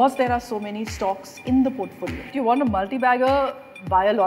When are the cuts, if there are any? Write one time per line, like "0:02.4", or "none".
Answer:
0:02.3